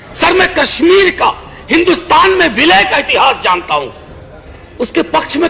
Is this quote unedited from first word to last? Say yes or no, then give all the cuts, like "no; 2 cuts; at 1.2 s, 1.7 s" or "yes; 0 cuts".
no; 1 cut; at 4.5 s